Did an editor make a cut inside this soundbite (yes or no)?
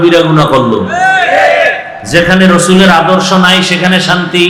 no